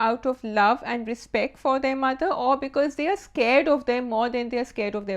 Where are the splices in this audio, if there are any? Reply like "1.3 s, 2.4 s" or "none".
none